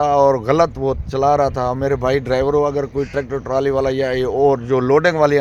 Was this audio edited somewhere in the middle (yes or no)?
no